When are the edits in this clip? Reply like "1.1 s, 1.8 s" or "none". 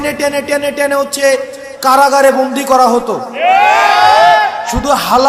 none